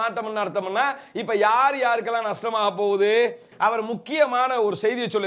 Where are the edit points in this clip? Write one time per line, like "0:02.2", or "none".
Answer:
0:03.5

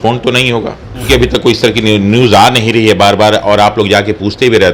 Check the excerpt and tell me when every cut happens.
0:01.1

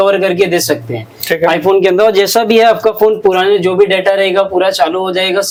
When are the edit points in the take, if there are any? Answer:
none

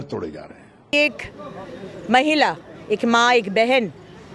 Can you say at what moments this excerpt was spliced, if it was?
0:00.9

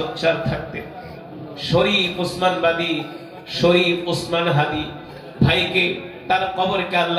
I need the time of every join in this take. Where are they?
none

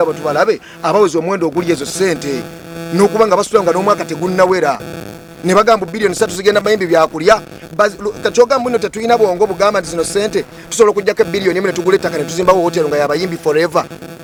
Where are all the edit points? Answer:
none

